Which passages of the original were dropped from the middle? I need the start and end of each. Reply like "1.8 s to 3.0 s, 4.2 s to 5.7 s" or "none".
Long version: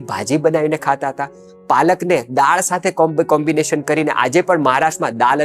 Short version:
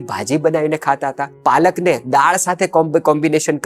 1.3 s to 1.5 s

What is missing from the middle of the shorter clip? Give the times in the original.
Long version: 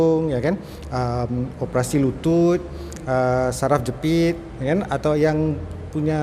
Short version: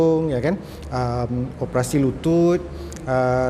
none

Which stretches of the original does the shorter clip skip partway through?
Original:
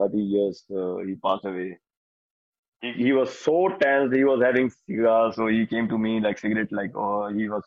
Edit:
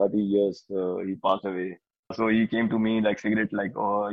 2.1 s to 5.3 s

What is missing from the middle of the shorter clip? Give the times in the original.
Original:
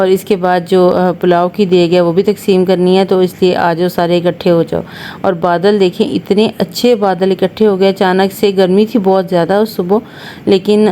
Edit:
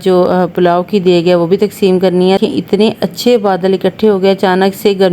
3.1 s to 6.0 s

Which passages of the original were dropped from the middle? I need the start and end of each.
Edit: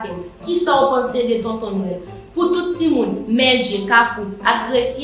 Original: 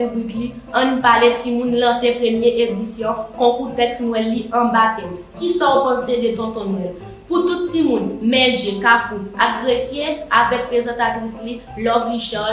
none

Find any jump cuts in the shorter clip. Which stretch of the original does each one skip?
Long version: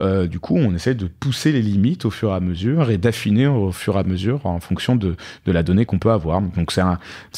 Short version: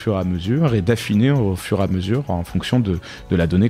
none

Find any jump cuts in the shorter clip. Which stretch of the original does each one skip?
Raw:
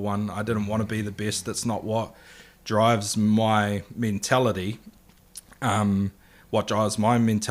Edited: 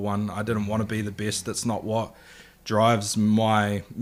none

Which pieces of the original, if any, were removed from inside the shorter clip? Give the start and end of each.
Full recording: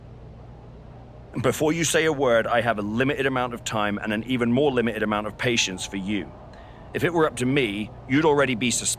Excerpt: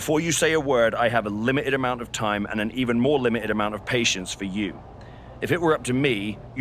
none

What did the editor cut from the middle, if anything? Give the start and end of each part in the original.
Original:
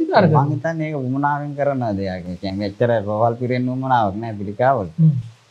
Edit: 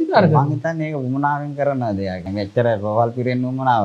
2.2 s to 2.5 s

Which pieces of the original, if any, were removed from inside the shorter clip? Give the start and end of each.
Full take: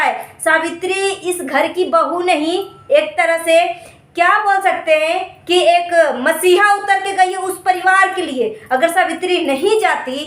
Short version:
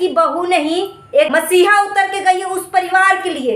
3.1 s to 6.2 s

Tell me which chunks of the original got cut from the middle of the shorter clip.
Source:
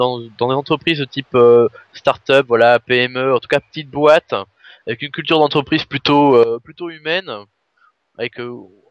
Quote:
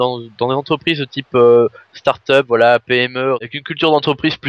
3.4 s to 4.9 s

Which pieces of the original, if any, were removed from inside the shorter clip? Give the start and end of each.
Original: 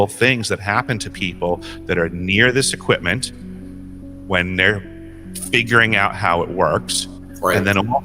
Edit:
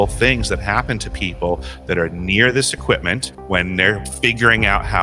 3.3 s to 4.1 s, 4.9 s to 5.4 s

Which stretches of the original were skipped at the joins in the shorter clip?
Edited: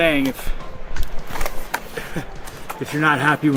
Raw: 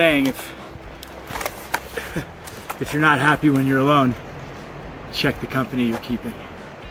none

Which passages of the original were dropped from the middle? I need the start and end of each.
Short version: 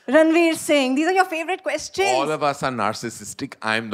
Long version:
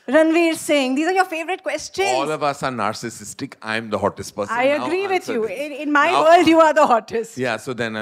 none

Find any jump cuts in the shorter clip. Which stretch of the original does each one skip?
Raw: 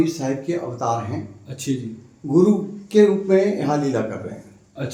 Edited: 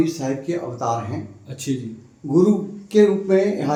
none

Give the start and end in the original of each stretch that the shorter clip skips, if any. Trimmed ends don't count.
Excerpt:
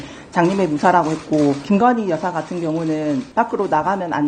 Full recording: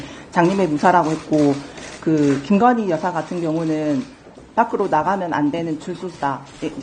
1.6 s to 2.4 s, 4.1 s to 4.5 s

